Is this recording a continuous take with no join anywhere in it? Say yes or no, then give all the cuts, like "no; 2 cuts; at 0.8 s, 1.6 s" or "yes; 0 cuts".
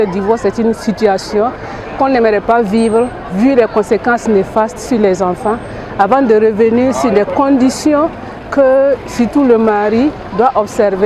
yes; 0 cuts